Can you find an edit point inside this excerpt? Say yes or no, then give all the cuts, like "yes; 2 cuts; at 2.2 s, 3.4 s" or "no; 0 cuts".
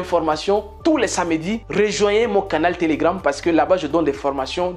yes; 1 cut; at 1.6 s